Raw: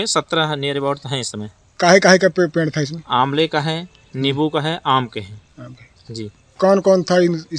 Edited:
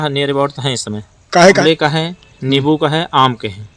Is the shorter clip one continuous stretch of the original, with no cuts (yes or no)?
no